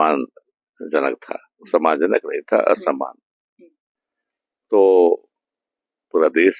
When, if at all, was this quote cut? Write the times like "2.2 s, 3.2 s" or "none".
none